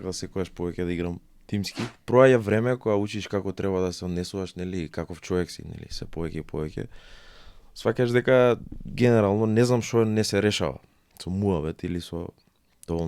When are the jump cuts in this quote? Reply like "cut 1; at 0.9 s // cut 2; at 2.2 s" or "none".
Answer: cut 1; at 1.9 s

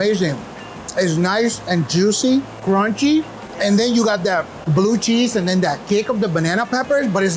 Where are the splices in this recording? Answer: cut 1; at 2.5 s // cut 2; at 3.4 s // cut 3; at 4.6 s

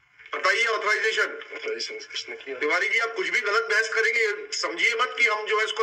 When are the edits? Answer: none

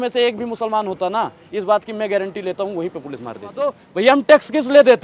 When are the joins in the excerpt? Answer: cut 1; at 3.8 s

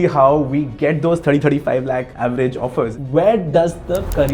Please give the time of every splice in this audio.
cut 1; at 2.1 s // cut 2; at 2.9 s

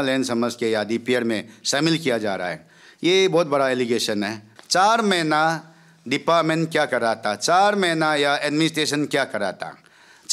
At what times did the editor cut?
cut 1; at 4.4 s

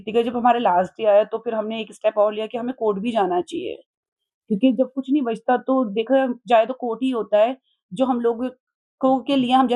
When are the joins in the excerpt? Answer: none

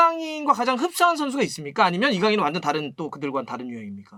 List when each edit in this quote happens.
none

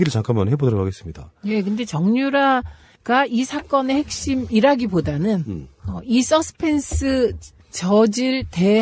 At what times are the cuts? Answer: cut 1; at 6.2 s

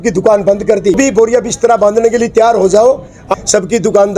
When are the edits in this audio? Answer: cut 1; at 1.0 s // cut 2; at 3.3 s

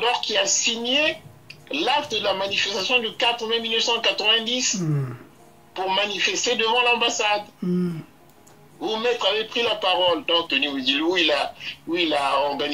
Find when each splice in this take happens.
cut 1; at 10.5 s

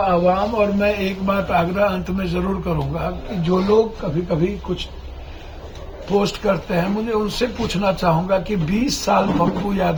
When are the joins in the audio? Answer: none

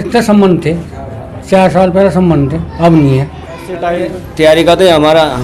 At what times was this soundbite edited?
cut 1; at 3.8 s

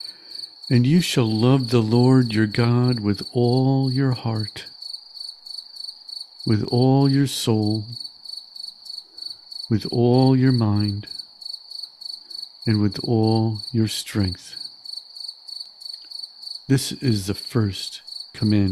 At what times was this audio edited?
none

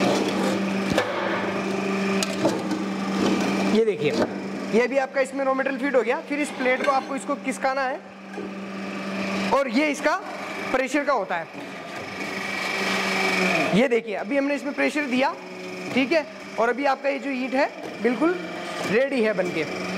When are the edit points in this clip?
none

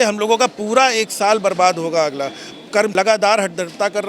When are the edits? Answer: cut 1; at 2.9 s

